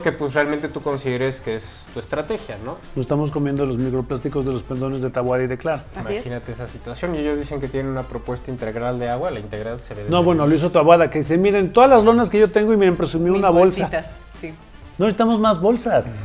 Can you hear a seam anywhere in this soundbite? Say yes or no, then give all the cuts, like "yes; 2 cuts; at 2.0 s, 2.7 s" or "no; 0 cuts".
yes; 1 cut; at 2.8 s